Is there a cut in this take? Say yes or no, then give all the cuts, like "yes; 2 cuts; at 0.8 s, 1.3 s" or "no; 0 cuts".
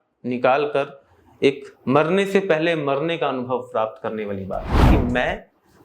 yes; 1 cut; at 4.9 s